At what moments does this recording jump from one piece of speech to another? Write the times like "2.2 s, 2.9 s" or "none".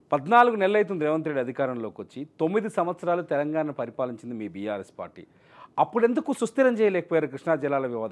none